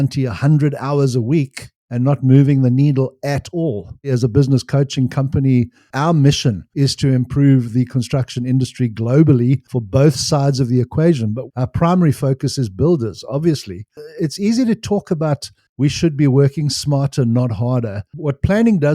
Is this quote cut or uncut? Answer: cut